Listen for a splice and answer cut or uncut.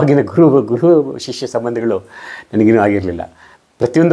uncut